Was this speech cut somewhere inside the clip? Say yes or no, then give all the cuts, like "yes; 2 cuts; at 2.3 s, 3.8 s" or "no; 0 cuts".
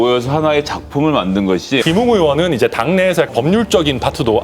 yes; 2 cuts; at 1.8 s, 3.3 s